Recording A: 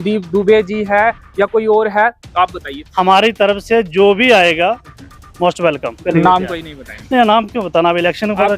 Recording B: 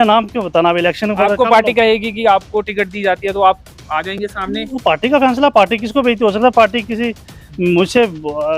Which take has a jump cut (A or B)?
A